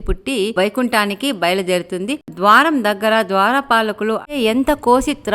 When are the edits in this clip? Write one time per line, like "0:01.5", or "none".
0:04.4